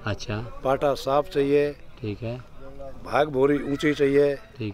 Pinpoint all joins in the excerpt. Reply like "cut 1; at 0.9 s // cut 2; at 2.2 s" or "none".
none